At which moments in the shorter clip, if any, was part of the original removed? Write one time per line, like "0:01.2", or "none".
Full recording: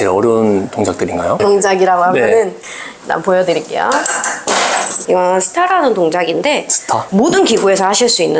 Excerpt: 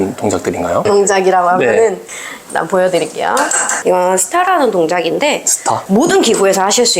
0:03.7